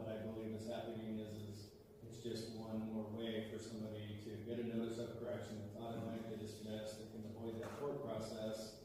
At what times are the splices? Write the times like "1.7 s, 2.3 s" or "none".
none